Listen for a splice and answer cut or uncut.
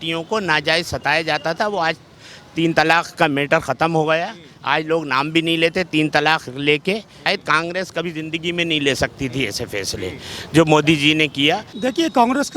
cut